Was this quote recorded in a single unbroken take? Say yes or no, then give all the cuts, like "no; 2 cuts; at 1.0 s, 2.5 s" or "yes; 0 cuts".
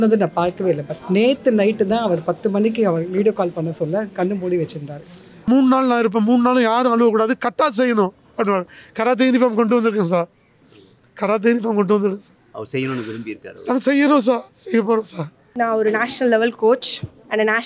no; 2 cuts; at 5.5 s, 15.5 s